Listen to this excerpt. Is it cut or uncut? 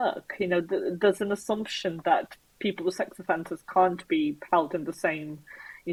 uncut